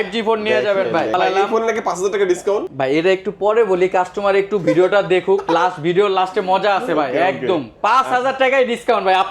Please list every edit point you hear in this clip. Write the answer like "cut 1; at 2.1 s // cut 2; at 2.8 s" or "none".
cut 1; at 1.1 s // cut 2; at 2.7 s